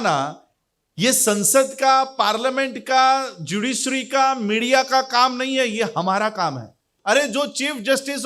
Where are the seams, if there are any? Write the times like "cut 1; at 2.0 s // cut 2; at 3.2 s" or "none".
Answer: cut 1; at 6.9 s